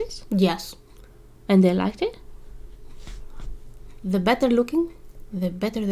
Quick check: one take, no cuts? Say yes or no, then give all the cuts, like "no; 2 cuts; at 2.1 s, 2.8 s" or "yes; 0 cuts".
yes; 0 cuts